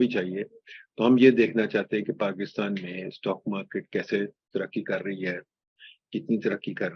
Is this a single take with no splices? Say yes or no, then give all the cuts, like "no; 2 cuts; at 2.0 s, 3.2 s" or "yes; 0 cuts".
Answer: yes; 0 cuts